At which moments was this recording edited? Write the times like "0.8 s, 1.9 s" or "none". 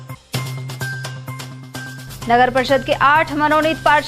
none